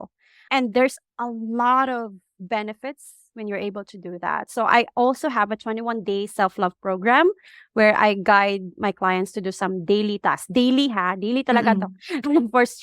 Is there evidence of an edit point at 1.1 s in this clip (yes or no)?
yes